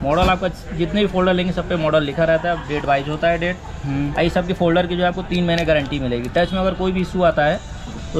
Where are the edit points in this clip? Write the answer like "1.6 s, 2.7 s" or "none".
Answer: none